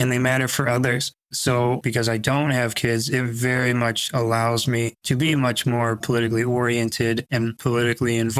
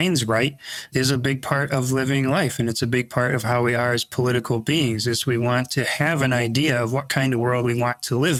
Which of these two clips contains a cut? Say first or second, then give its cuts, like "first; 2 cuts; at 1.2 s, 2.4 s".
first; 3 cuts; at 1.8 s, 5.0 s, 7.5 s